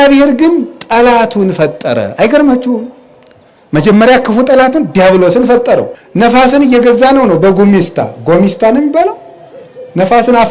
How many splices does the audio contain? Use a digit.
1